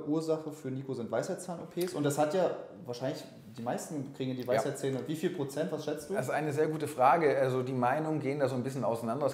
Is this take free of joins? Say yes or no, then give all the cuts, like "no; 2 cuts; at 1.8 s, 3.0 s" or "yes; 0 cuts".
yes; 0 cuts